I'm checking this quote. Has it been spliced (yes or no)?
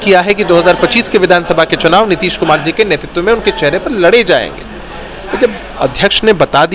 no